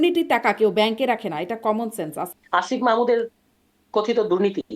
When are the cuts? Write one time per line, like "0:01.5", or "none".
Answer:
0:02.2

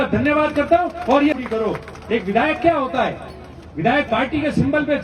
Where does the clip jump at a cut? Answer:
0:01.3

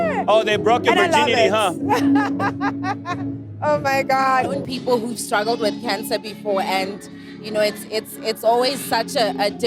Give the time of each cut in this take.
0:04.6

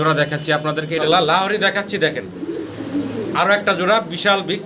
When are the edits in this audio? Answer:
0:01.0

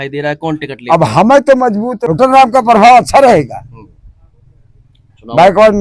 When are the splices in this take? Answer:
0:02.0

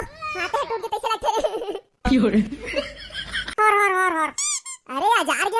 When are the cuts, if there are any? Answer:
0:03.6

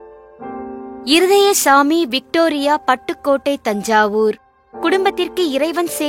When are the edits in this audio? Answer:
0:01.0

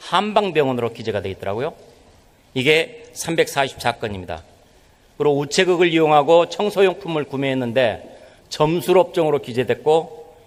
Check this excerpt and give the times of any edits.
none

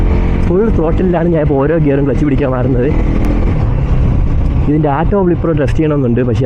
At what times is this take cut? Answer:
none

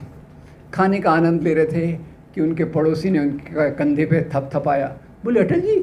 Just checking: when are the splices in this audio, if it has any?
none

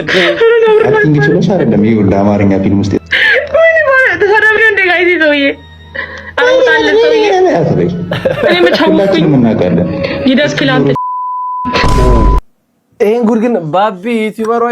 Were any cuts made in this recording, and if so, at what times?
0:12.4

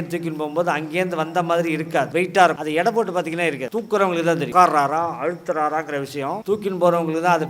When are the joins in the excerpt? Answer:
0:02.1
0:02.6
0:03.6
0:04.5
0:06.4

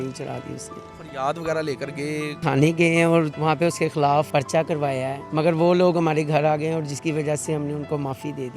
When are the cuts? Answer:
0:00.9
0:02.4
0:03.3
0:04.3
0:05.2

